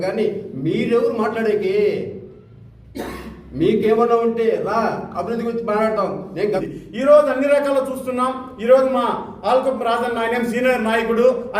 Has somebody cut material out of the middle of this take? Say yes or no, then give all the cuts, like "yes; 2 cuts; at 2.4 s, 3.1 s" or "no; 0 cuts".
yes; 1 cut; at 6.6 s